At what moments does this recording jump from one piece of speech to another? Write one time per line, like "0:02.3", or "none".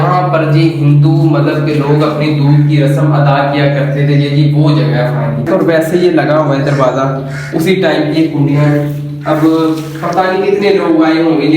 0:05.5